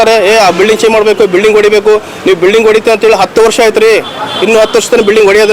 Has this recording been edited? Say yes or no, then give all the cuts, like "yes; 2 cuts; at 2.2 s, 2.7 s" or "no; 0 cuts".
no; 0 cuts